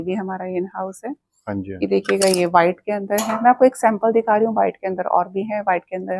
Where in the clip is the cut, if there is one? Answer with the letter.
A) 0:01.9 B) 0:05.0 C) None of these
C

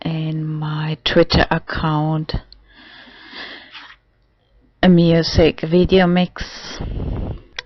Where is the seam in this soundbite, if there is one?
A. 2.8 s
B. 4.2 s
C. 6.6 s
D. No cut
D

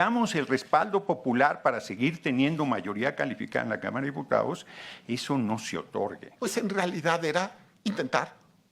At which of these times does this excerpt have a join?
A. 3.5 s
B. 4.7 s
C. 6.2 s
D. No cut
C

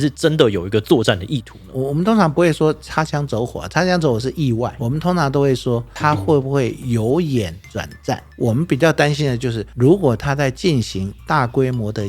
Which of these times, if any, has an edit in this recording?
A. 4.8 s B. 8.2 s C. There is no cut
A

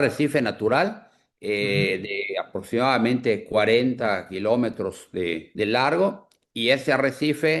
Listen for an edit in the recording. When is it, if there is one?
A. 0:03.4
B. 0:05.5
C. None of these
B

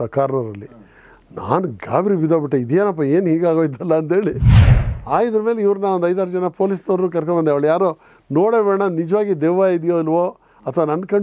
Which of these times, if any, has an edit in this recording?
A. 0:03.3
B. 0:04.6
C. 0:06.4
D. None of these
B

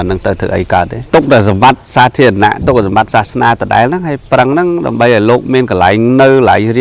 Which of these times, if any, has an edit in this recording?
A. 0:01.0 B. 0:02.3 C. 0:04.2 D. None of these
A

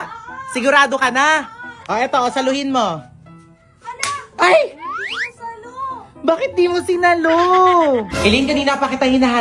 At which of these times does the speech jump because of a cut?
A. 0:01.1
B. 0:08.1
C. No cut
B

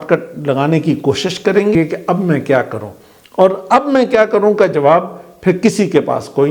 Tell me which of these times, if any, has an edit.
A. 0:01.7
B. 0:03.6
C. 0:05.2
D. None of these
A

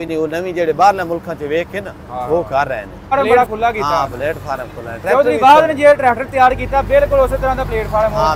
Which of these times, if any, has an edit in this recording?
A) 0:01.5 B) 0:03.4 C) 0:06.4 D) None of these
B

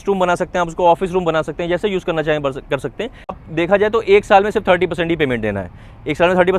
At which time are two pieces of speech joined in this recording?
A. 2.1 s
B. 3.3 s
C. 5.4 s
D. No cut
B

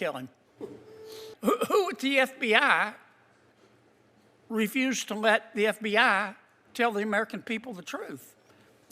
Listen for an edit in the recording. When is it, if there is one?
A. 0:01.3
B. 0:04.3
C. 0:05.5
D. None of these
A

